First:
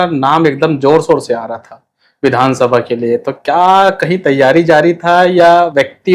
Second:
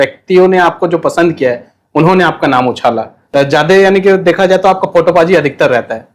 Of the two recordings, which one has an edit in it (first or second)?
second